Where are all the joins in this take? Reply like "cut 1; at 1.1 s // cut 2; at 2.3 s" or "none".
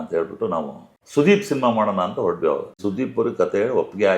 cut 1; at 2.7 s